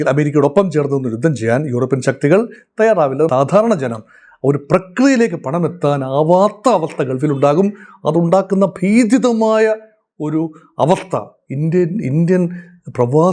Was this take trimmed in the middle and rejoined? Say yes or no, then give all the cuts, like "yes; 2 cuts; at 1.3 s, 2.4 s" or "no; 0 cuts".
yes; 1 cut; at 3.3 s